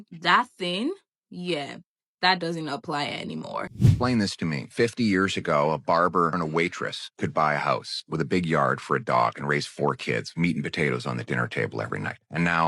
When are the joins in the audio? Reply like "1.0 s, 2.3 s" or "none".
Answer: 3.7 s